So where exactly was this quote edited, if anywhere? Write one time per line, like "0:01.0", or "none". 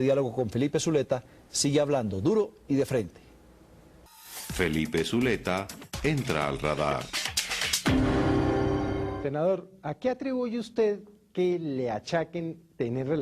0:05.5